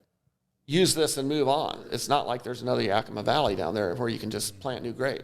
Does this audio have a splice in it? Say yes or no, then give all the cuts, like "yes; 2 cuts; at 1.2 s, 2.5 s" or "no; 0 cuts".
yes; 1 cut; at 1.9 s